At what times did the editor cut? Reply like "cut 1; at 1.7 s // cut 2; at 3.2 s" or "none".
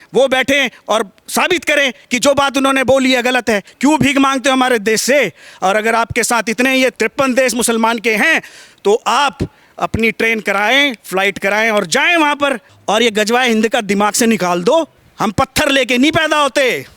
cut 1; at 3.7 s // cut 2; at 6.9 s // cut 3; at 12.7 s // cut 4; at 15.0 s